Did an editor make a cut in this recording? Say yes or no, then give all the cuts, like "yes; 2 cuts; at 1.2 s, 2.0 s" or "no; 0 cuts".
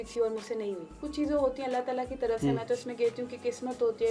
yes; 1 cut; at 0.9 s